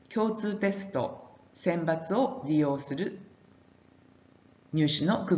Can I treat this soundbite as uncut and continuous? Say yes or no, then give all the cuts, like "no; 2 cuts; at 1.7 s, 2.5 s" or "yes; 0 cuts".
no; 1 cut; at 2.6 s